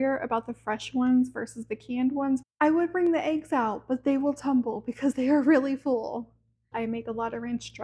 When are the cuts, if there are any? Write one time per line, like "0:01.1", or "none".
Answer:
0:02.5
0:06.7